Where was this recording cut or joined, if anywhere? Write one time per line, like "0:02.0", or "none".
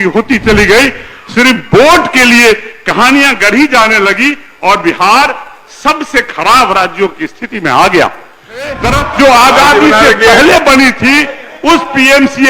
0:08.9